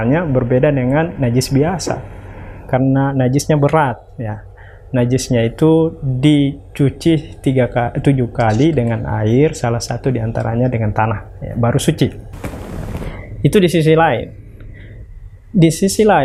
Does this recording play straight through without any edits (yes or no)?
yes